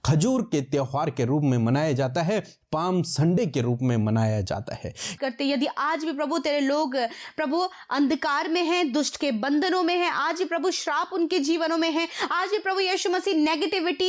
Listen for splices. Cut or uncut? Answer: cut